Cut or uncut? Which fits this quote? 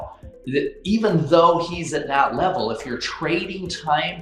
uncut